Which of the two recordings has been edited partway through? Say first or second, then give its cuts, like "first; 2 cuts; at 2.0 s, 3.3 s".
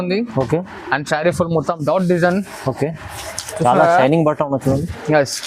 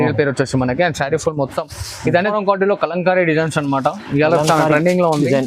second; 1 cut; at 2.3 s